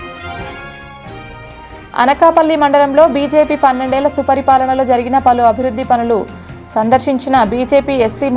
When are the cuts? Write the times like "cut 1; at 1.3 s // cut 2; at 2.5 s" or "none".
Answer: cut 1; at 1.6 s